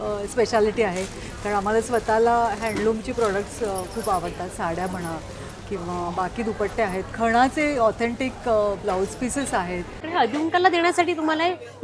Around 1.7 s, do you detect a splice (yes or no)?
no